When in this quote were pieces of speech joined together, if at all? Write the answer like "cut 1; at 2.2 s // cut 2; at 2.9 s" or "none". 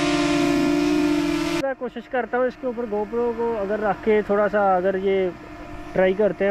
cut 1; at 1.6 s